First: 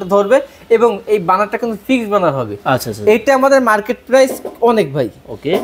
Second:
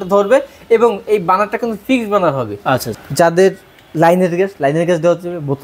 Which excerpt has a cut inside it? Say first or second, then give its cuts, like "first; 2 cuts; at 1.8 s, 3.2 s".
second; 1 cut; at 2.9 s